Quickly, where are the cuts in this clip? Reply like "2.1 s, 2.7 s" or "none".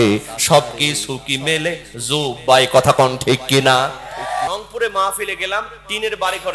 4.5 s